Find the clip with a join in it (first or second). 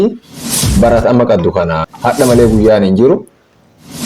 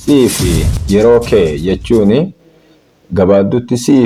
first